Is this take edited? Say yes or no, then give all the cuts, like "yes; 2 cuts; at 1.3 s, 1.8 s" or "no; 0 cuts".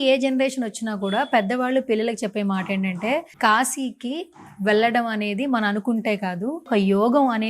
yes; 2 cuts; at 3.3 s, 6.7 s